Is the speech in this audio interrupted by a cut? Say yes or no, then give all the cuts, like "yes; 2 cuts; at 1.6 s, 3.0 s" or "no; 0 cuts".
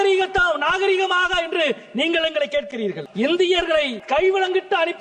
yes; 2 cuts; at 3.0 s, 4.0 s